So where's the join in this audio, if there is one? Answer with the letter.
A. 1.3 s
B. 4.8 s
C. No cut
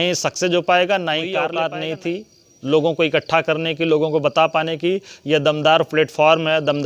A